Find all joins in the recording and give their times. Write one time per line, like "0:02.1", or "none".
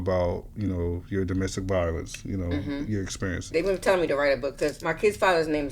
0:03.5
0:04.8